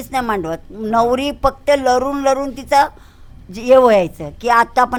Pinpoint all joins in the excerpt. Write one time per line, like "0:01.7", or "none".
none